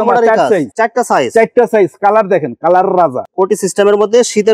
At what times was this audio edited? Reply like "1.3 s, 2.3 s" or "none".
3.2 s

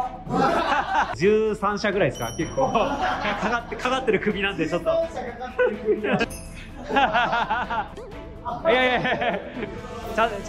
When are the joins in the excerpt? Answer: 1.1 s, 6.2 s, 8.0 s

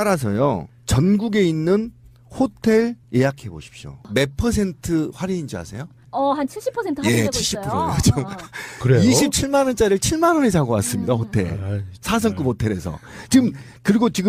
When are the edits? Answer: none

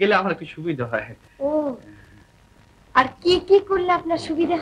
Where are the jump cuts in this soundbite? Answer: none

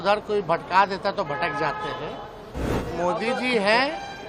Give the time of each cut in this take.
2.7 s

